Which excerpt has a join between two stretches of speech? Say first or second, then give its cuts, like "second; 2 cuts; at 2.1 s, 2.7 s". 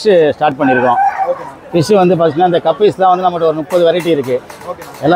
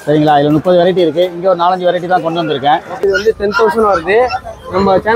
second; 1 cut; at 3.0 s